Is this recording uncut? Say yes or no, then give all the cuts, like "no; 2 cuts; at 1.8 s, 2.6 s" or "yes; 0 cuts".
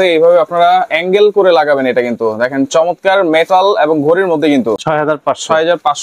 yes; 0 cuts